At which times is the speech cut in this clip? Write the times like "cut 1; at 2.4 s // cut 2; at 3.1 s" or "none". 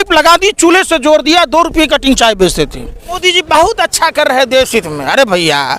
cut 1; at 3.2 s